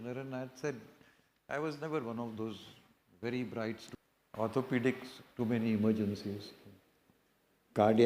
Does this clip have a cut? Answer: yes; 1 cut; at 3.8 s

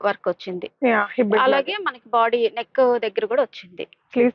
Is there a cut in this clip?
no; 0 cuts

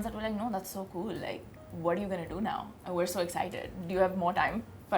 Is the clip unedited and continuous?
yes; 0 cuts

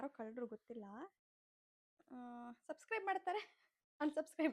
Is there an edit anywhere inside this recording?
no; 0 cuts

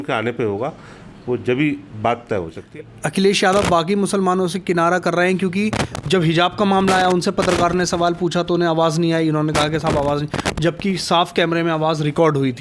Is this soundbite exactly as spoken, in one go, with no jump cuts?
no; 1 cut; at 2.6 s

